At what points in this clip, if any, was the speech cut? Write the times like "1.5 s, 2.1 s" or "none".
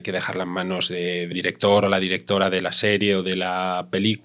1.3 s